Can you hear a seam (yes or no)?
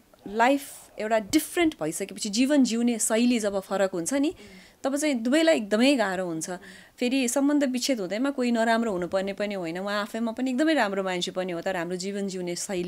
no